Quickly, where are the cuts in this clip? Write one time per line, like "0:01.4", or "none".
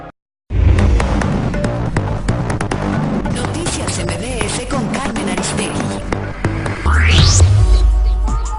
none